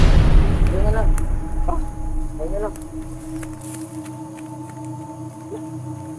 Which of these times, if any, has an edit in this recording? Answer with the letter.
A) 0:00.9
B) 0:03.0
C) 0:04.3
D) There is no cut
D